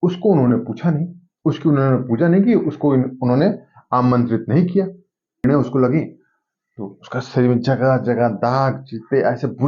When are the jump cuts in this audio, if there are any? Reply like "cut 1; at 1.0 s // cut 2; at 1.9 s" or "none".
cut 1; at 5.4 s